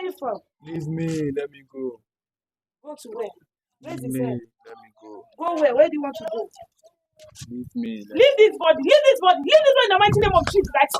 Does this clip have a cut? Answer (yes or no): no